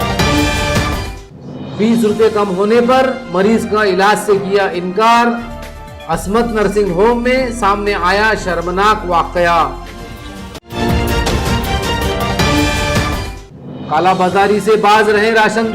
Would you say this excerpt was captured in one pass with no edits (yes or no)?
no